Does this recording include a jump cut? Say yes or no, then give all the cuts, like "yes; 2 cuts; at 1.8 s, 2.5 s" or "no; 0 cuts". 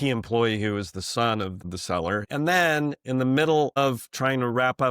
yes; 1 cut; at 2.0 s